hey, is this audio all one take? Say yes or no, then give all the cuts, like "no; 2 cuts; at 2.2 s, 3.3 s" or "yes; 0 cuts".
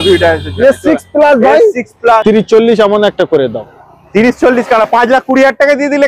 no; 1 cut; at 2.2 s